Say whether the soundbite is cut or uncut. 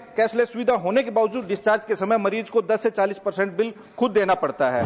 uncut